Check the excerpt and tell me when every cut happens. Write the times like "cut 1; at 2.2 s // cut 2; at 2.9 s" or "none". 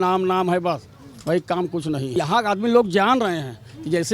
cut 1; at 2.1 s